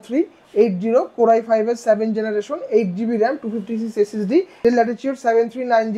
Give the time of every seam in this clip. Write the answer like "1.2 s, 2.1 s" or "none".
4.6 s